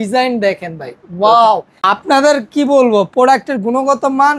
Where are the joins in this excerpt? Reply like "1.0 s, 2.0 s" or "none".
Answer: 1.8 s